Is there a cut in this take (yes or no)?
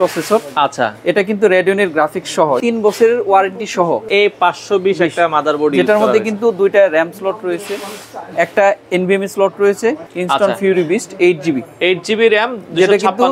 yes